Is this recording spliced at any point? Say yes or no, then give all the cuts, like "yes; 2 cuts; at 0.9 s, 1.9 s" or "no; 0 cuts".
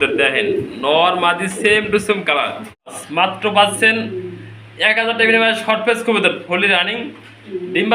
yes; 1 cut; at 3.0 s